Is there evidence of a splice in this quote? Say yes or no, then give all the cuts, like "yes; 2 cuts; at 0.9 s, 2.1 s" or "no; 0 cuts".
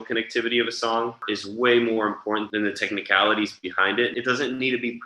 yes; 1 cut; at 4.1 s